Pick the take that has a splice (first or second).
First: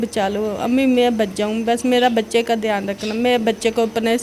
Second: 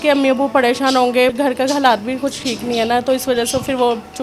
second